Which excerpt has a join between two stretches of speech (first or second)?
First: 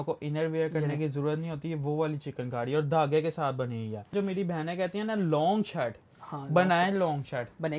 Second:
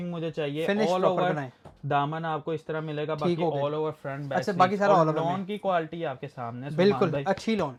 first